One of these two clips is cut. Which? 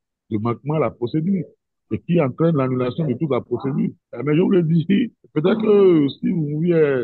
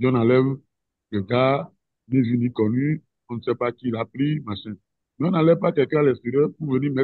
first; 2 cuts; at 4.1 s, 5.2 s

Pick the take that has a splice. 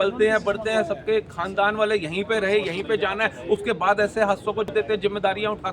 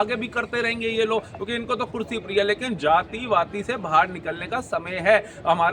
first; 1 cut; at 4.7 s

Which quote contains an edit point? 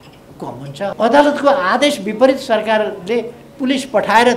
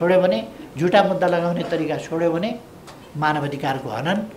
first; 1 cut; at 0.9 s

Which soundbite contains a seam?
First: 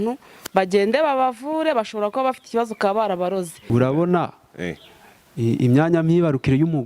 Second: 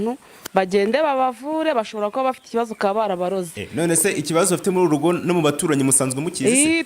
first; 1 cut; at 3.6 s

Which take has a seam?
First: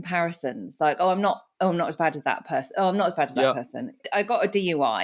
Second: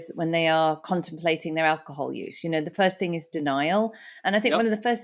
first; 1 cut; at 4.1 s

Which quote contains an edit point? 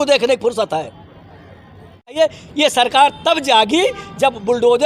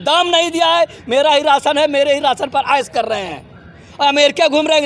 first; 1 cut; at 2.2 s

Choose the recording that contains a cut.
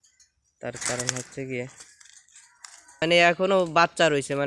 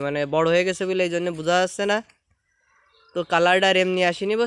first; 1 cut; at 3.0 s

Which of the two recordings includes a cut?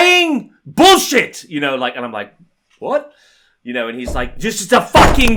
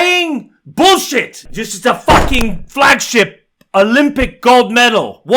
second; 1 cut; at 1.4 s

